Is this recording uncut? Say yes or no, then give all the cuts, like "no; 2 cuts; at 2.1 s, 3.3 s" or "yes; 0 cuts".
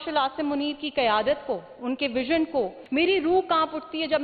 no; 1 cut; at 2.8 s